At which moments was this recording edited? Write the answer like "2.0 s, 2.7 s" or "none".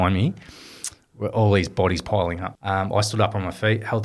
2.5 s